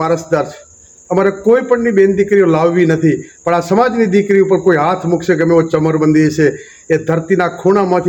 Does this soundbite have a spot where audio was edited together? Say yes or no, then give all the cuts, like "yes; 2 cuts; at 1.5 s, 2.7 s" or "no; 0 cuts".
no; 0 cuts